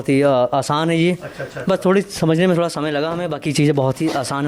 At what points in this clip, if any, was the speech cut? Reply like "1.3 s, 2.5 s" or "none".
none